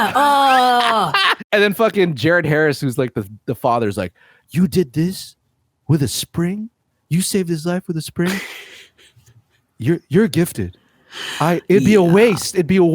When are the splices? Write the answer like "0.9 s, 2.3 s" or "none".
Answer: 1.4 s

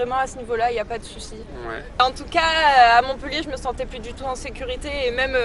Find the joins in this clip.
2.0 s

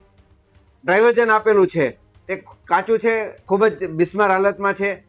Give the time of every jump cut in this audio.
3.3 s

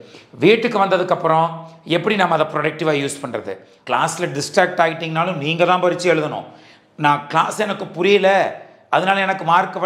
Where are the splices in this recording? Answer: 3.7 s

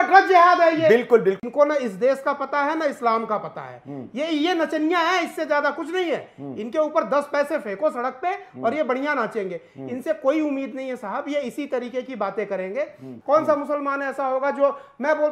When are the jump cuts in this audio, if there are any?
1.4 s, 13.1 s

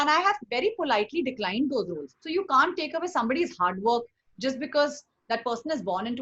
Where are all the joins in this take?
2.2 s

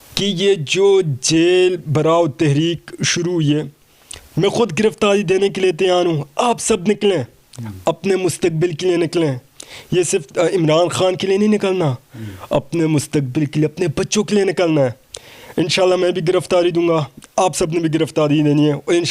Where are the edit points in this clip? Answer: none

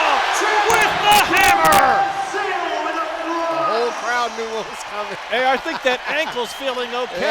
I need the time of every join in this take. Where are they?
none

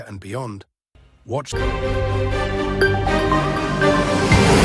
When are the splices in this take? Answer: 1.5 s

